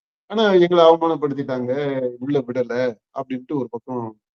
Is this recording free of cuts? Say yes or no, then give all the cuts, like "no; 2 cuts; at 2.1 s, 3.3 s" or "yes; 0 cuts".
yes; 0 cuts